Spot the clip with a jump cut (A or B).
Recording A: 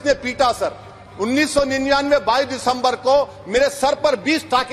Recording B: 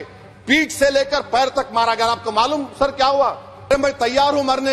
B